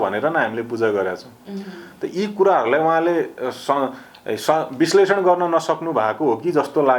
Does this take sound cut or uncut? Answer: uncut